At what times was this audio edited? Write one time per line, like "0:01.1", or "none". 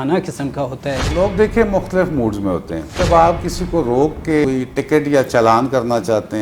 0:01.1
0:02.8
0:04.4